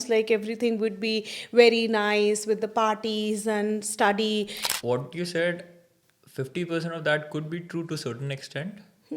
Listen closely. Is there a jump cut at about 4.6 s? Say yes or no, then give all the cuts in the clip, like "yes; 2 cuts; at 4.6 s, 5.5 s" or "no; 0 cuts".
yes; 1 cut; at 4.6 s